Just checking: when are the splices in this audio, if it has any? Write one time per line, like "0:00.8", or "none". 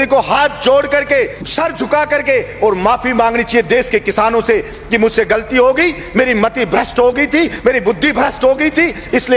0:01.4